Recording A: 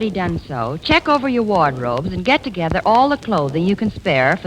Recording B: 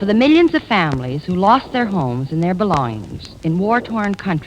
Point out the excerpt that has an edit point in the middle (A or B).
B